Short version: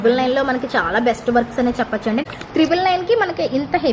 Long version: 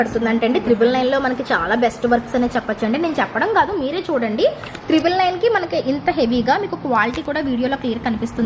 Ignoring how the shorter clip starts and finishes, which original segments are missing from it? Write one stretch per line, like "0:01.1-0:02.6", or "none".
0:03.0-0:04.6